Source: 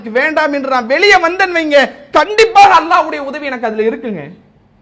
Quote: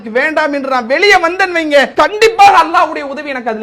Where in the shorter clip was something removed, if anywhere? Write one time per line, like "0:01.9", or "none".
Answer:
0:01.9